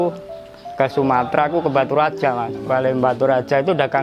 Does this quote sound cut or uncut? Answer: cut